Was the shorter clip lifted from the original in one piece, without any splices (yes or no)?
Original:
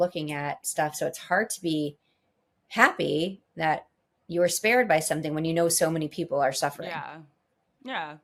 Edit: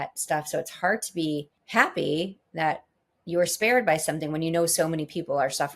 no